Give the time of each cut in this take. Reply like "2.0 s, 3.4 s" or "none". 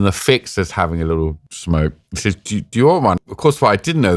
1.5 s, 3.2 s